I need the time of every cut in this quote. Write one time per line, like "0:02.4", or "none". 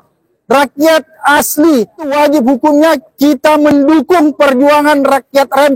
0:02.1